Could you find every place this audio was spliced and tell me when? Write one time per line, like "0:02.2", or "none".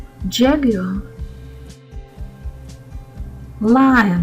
0:01.7
0:03.5